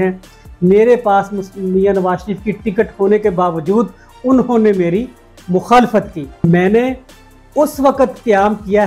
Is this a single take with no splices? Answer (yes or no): no